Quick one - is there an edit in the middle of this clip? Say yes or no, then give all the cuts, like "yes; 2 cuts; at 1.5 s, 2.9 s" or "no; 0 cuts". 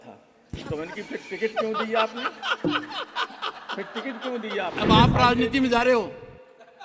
yes; 1 cut; at 4.7 s